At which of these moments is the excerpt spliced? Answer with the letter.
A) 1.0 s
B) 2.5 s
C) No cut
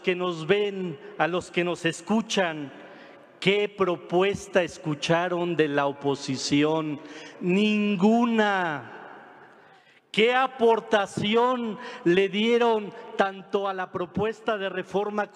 B